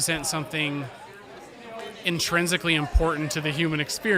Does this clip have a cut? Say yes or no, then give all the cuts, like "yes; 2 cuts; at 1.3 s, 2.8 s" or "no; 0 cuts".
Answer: no; 0 cuts